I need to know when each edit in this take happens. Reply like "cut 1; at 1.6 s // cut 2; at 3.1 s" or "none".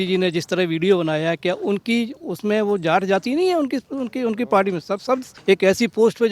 cut 1; at 5.3 s